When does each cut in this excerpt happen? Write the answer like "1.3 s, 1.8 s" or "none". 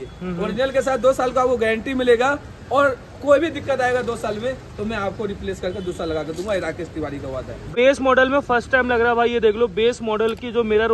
7.7 s